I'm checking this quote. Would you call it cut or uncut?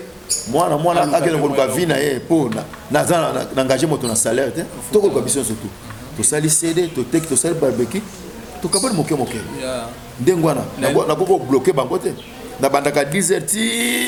uncut